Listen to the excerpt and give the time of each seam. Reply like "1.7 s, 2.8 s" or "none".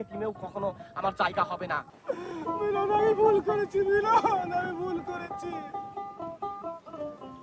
1.9 s